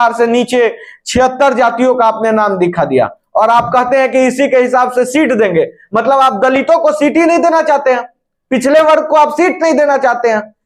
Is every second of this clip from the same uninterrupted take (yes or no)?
yes